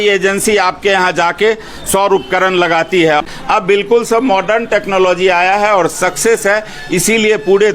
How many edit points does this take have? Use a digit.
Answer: 1